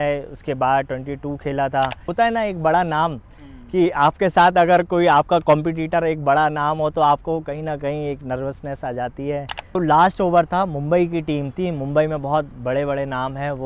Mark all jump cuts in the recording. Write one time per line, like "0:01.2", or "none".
0:02.0
0:09.8